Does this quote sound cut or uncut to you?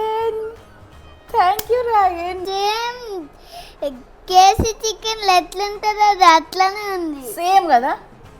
cut